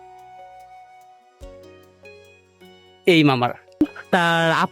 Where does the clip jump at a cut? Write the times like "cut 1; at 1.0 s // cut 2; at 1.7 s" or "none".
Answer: cut 1; at 3.8 s